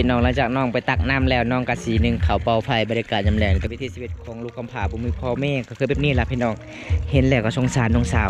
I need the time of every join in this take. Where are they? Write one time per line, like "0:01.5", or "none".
0:03.7